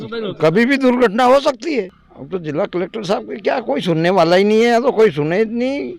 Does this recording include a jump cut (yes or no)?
no